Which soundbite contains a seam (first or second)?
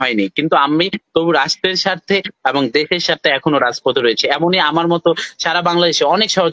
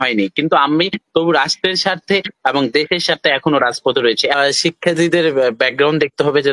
second